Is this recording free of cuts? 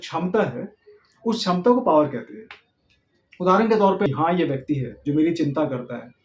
no; 1 cut; at 4.1 s

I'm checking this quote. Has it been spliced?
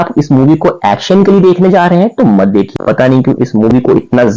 yes; 1 cut; at 2.7 s

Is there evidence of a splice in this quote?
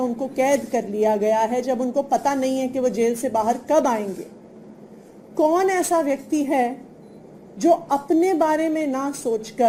no; 0 cuts

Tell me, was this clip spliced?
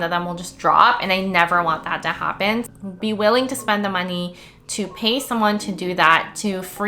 yes; 1 cut; at 2.7 s

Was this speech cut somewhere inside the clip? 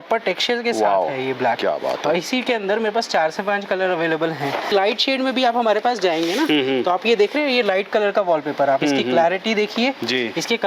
yes; 1 cut; at 4.7 s

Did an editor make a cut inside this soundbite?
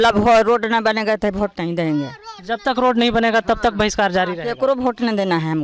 no; 0 cuts

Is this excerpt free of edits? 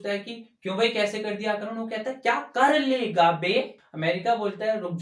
no; 1 cut; at 3.8 s

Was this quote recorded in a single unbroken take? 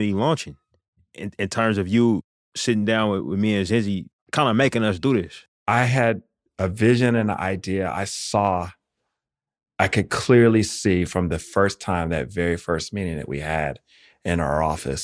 no; 2 cuts; at 4.3 s, 5.4 s

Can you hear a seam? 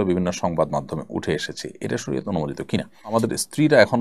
yes; 1 cut; at 3.0 s

